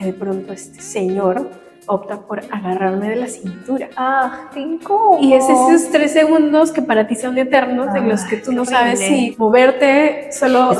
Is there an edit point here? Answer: no; 0 cuts

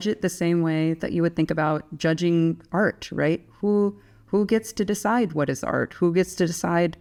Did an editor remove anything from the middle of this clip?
no; 0 cuts

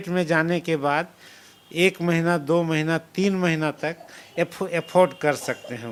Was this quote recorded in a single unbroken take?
yes; 0 cuts

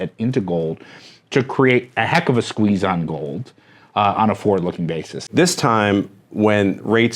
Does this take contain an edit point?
yes; 1 cut; at 5.3 s

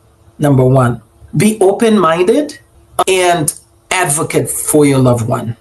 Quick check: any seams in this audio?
yes; 1 cut; at 3.0 s

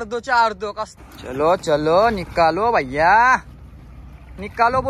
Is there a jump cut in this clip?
yes; 1 cut; at 0.9 s

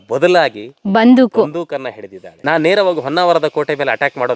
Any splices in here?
yes; 1 cut; at 2.3 s

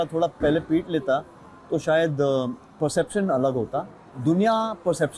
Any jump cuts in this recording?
yes; 1 cut; at 4.0 s

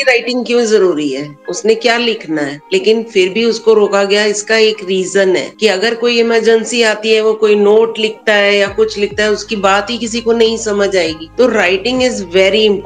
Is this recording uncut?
no; 1 cut; at 2.6 s

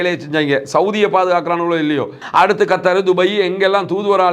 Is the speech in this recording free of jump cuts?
no; 1 cut; at 2.2 s

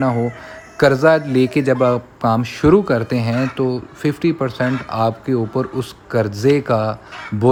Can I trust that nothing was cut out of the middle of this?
yes; 0 cuts

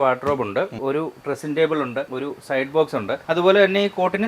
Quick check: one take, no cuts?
no; 3 cuts; at 0.8 s, 2.1 s, 3.2 s

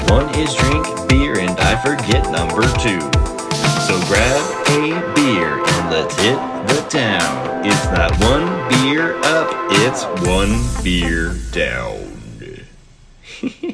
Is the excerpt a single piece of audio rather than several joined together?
yes; 0 cuts

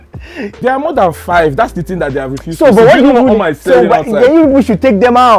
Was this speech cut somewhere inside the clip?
no; 0 cuts

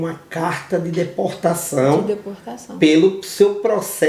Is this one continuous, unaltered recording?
yes; 0 cuts

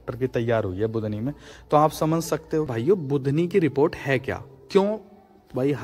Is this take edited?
yes; 1 cut; at 2.7 s

